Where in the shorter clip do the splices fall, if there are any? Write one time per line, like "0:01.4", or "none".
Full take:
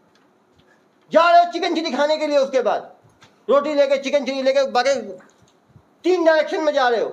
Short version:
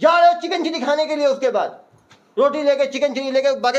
none